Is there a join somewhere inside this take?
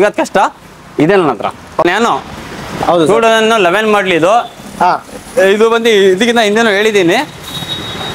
yes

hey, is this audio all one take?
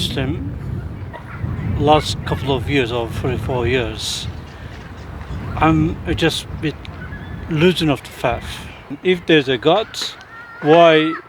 no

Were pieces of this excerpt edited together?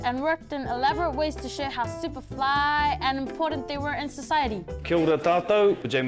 yes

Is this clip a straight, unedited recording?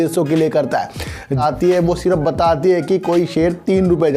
no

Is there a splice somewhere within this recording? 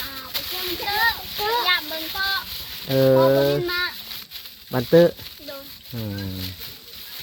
no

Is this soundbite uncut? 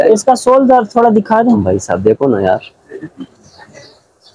yes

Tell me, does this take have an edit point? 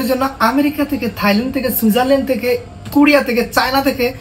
no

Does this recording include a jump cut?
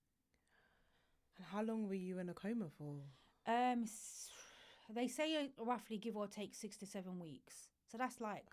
no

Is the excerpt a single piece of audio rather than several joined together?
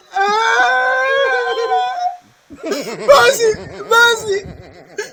yes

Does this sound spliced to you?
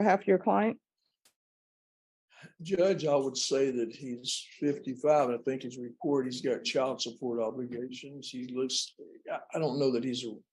yes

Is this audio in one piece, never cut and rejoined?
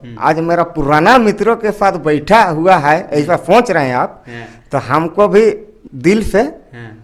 yes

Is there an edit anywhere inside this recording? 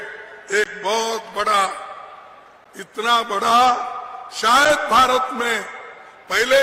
no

